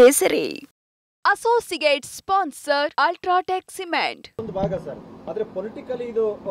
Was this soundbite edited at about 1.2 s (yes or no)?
no